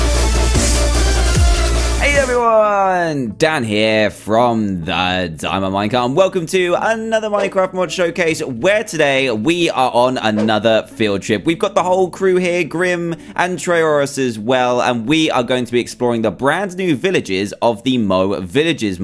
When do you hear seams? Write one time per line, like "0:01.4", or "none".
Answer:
0:01.7